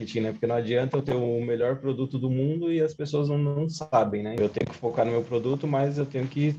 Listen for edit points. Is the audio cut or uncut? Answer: cut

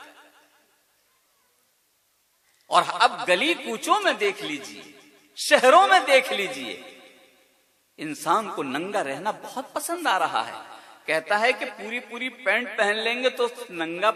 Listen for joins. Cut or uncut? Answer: uncut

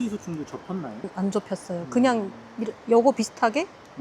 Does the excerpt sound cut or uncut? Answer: cut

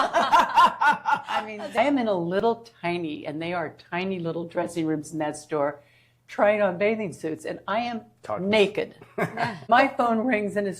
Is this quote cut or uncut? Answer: cut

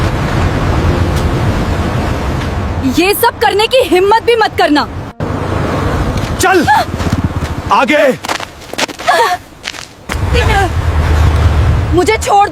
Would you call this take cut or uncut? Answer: cut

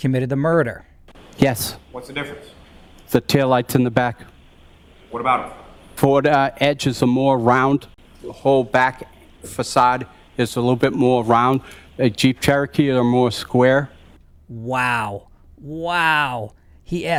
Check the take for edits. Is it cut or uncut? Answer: uncut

